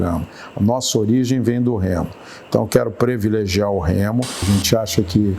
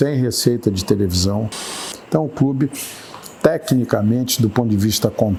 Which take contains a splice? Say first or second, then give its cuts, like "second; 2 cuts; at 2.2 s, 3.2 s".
first; 1 cut; at 4.4 s